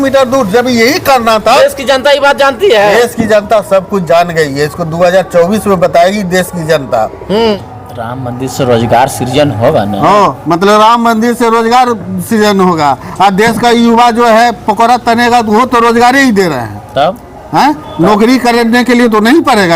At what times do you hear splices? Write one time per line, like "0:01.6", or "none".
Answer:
0:07.6